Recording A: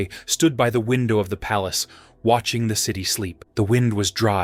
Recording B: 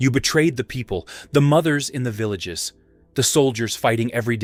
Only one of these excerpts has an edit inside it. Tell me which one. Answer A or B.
A